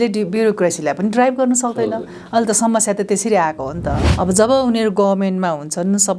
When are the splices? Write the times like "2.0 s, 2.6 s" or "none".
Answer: 4.1 s